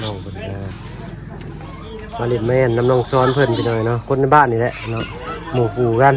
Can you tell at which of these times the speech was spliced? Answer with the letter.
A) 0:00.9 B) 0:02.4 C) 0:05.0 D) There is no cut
D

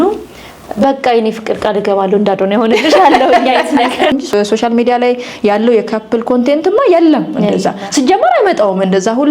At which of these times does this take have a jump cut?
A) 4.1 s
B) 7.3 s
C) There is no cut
A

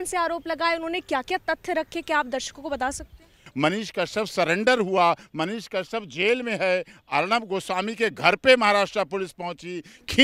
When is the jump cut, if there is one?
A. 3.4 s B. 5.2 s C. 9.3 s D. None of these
A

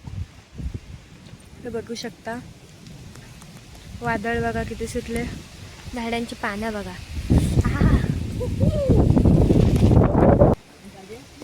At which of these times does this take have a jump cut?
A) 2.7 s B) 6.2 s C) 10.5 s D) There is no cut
C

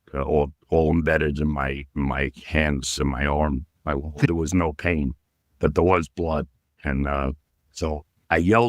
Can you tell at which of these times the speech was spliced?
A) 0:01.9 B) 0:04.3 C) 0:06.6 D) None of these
B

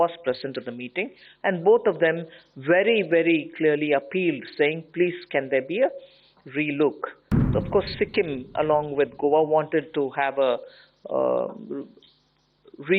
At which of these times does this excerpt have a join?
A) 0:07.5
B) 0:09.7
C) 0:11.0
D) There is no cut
A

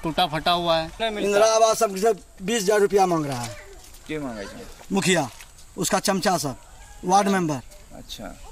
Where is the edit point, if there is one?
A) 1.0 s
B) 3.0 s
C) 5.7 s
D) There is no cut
A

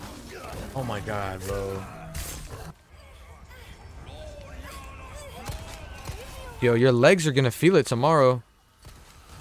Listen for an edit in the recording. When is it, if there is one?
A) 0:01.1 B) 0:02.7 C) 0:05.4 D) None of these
B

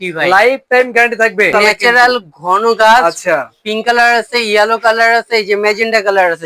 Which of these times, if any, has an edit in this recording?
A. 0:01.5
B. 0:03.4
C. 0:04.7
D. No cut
A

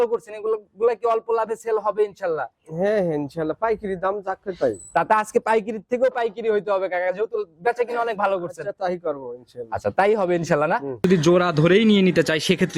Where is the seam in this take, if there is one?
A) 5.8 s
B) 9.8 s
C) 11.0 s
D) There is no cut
C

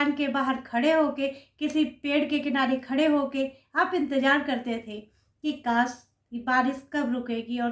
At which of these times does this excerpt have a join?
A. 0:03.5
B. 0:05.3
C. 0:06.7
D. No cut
D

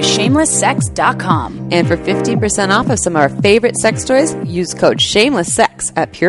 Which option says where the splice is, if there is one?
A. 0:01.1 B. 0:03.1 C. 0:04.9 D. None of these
D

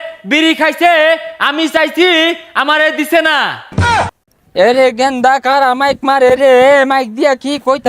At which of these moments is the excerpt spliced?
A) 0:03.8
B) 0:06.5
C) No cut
C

